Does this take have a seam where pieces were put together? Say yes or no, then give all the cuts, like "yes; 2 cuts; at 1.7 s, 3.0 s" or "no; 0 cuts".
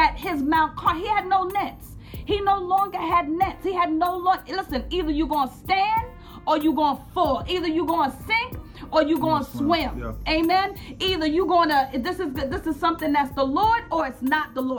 no; 0 cuts